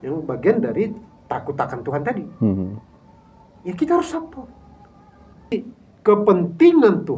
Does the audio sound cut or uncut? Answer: cut